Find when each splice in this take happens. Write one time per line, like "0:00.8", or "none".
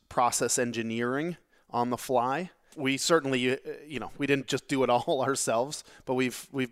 0:02.7